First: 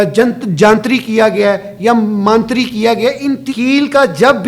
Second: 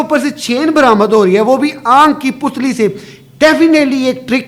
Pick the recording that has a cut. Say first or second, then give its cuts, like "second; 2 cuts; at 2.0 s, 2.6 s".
first; 1 cut; at 3.4 s